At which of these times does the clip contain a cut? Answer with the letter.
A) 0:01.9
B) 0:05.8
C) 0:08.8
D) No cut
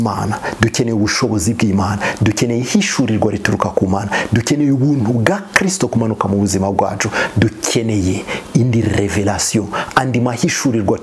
D